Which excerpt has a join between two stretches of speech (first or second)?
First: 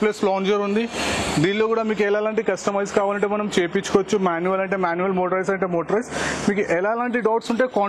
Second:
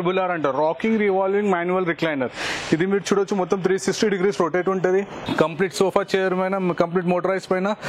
second